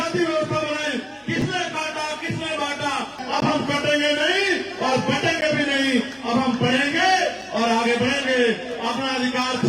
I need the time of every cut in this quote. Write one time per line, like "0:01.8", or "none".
0:03.2